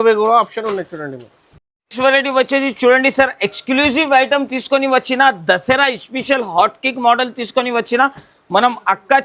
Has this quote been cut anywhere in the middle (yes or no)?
no